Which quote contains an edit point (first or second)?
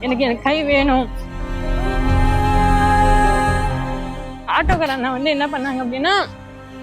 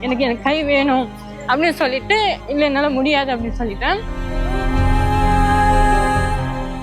first